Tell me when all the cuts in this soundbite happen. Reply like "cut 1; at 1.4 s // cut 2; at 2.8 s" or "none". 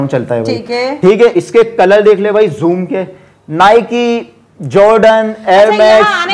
none